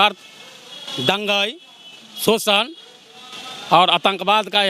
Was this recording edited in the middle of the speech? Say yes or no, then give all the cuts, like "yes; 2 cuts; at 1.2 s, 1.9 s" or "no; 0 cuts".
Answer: no; 0 cuts